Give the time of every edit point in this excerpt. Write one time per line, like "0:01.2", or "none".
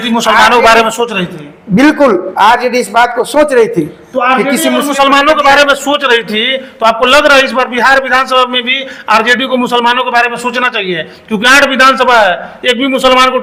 none